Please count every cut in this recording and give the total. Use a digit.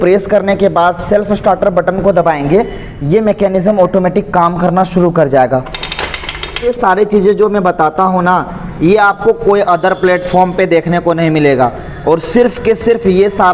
1